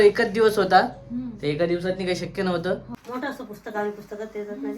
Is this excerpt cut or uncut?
cut